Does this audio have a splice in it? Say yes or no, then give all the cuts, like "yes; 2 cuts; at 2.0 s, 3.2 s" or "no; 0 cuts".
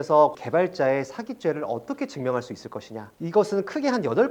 no; 0 cuts